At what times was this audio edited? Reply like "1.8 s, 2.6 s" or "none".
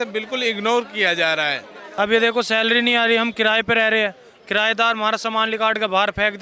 1.8 s